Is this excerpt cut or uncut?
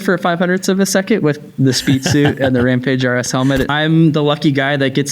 cut